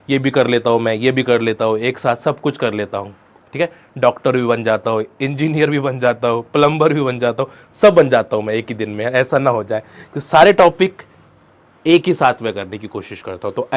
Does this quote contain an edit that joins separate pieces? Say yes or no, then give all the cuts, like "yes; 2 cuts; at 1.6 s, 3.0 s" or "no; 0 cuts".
no; 0 cuts